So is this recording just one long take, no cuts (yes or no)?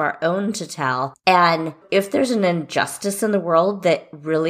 no